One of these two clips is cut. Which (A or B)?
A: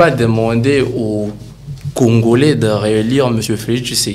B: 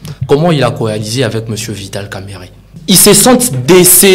B